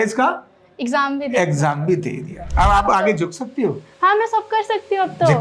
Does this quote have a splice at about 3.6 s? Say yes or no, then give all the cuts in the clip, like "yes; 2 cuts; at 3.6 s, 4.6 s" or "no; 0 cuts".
no; 1 cut; at 2.4 s